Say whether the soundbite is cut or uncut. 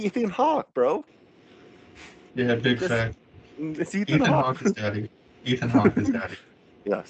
uncut